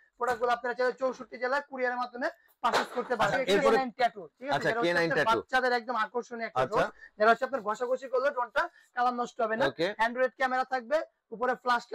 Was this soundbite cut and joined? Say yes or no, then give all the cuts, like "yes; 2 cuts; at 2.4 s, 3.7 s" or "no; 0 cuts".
yes; 1 cut; at 3.8 s